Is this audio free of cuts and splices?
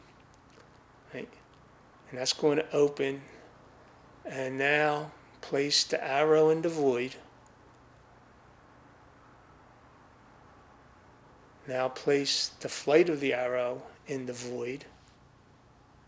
yes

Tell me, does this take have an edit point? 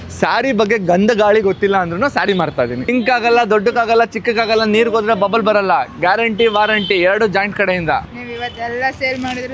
yes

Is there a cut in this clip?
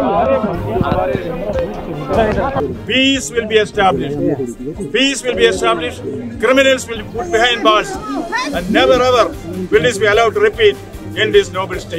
no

